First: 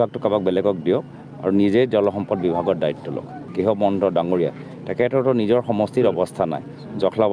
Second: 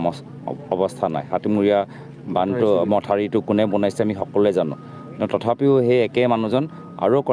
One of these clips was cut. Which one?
first; 1 cut; at 3.4 s

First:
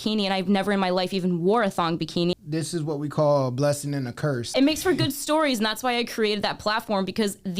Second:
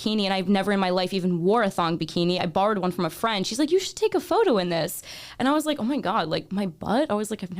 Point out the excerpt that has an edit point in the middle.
first; 2 cuts; at 2.4 s, 4.4 s

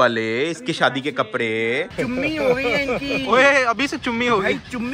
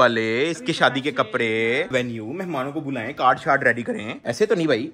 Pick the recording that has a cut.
first; 1 cut; at 1.9 s

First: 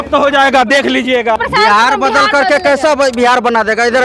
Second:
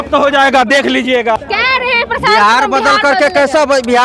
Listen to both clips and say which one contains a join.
first; 1 cut; at 1.4 s

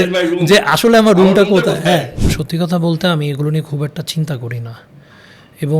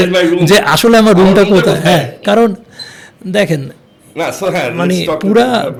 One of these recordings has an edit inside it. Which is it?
first; 1 cut; at 2.1 s

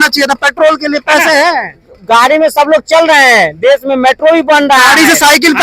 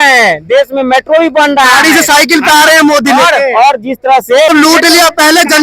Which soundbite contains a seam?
second; 1 cut; at 4.5 s

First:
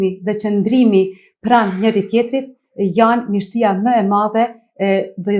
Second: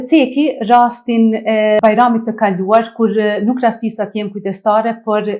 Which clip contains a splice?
second; 1 cut; at 1.8 s

